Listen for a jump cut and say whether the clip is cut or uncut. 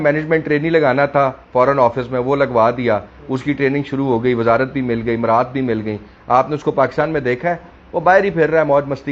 uncut